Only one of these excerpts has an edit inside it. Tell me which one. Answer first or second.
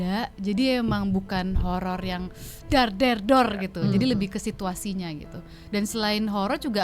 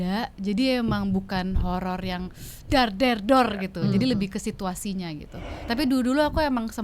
second